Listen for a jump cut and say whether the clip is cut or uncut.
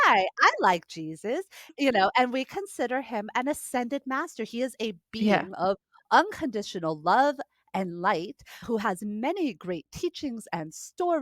cut